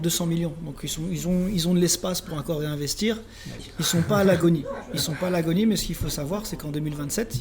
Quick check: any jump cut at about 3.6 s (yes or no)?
yes